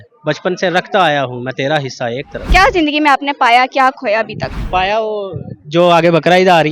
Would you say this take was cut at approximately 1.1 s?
no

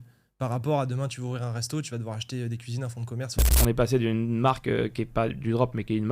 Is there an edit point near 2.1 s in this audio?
no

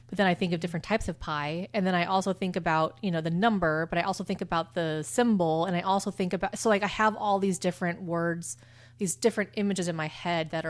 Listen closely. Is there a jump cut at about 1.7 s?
no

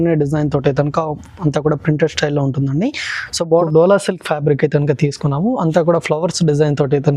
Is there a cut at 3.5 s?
yes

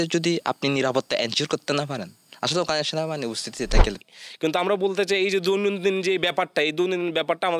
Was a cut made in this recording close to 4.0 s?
yes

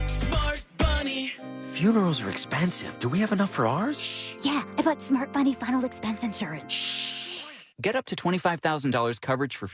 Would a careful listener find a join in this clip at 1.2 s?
yes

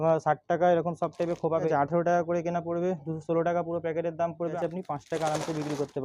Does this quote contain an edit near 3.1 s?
no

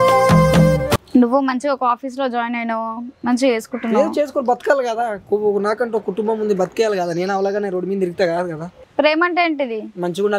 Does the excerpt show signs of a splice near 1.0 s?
yes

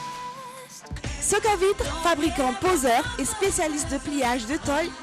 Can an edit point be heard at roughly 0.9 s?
yes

